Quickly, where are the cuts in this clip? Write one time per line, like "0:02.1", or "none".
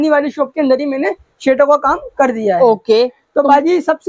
none

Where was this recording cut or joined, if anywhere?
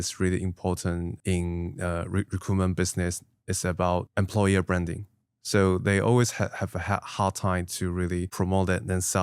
0:01.1
0:04.1

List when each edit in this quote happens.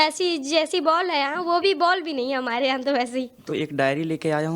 0:03.4

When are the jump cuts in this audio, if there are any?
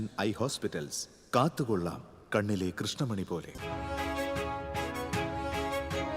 0:03.5

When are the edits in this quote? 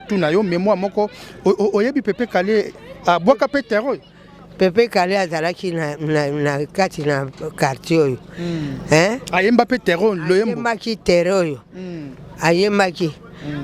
none

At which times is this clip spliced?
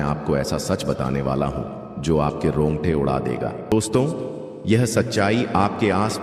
0:03.7

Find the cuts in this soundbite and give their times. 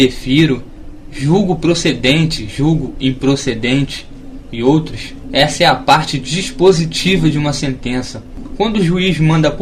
0:08.1

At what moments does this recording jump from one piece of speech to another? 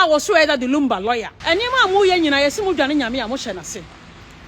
0:01.3

